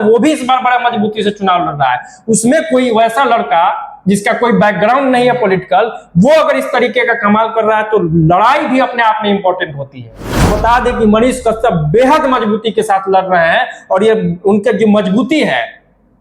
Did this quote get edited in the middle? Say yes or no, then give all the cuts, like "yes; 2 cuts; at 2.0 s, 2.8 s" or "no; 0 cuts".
yes; 1 cut; at 10.5 s